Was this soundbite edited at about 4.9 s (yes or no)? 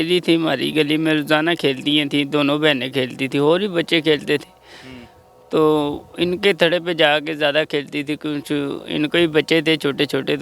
no